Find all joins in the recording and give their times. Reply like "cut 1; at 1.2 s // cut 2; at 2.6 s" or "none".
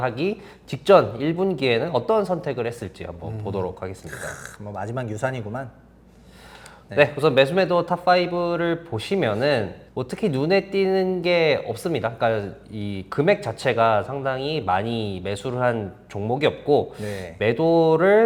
none